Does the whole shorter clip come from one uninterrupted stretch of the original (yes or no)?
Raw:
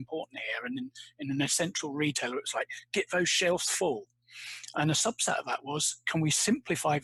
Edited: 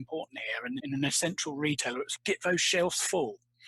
no